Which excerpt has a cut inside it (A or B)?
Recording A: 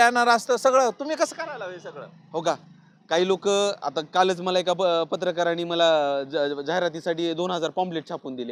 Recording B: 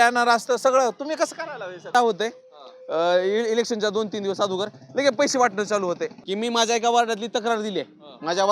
B